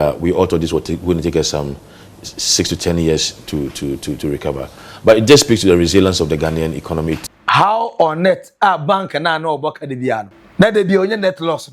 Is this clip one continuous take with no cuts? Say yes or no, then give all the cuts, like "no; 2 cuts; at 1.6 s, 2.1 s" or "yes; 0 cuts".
no; 2 cuts; at 7.2 s, 10.4 s